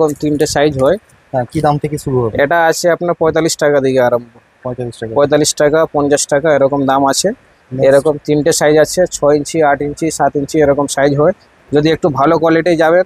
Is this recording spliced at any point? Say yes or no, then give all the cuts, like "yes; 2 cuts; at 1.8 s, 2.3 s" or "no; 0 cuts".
no; 0 cuts